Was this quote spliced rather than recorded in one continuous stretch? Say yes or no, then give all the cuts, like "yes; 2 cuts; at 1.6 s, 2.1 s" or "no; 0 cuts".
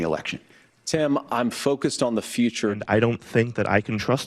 yes; 1 cut; at 2.8 s